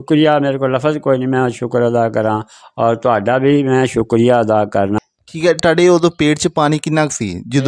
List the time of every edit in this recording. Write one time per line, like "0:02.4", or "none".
0:05.0